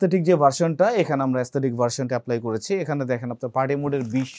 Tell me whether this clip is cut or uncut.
uncut